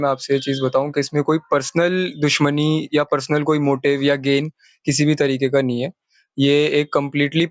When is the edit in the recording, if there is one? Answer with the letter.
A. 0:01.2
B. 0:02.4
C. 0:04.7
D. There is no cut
D